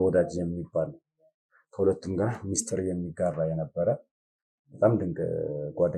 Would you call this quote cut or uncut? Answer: uncut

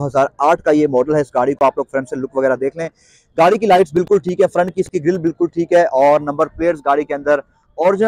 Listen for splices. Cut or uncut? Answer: uncut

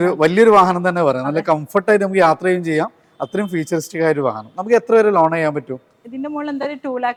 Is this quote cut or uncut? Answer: uncut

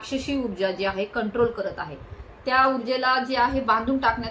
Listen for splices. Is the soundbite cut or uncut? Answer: uncut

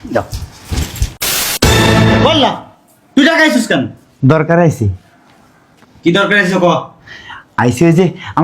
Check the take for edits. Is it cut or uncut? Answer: cut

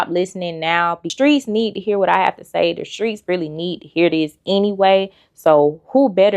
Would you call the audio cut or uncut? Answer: cut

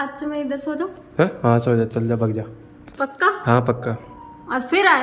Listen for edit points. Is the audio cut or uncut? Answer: uncut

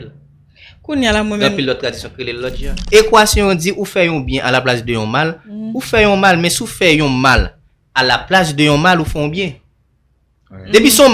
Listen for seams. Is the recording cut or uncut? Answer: cut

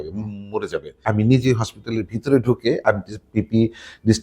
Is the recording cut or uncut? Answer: cut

